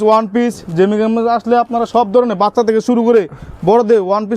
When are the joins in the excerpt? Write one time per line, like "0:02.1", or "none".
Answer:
none